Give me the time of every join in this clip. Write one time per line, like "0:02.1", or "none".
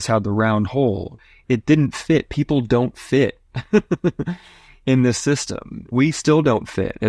0:05.9